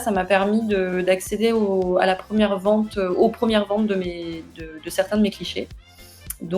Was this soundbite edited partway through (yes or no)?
no